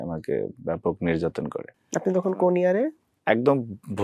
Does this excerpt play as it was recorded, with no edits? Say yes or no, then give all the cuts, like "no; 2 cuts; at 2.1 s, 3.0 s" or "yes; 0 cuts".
no; 2 cuts; at 1.7 s, 3.1 s